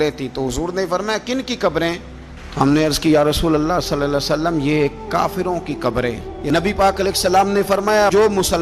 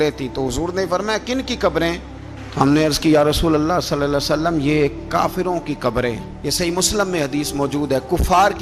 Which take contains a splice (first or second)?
first